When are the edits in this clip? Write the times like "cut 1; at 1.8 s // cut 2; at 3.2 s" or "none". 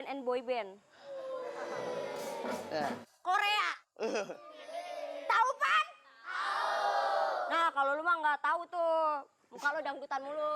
none